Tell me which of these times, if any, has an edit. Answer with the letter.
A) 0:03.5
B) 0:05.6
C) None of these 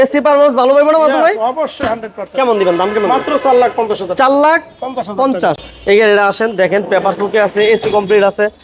B